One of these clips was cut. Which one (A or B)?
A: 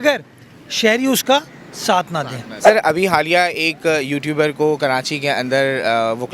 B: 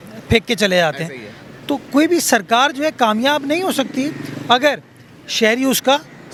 A